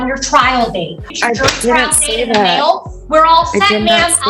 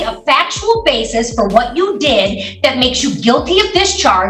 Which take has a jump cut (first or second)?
first